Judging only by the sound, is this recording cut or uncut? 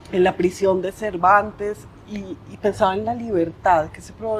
uncut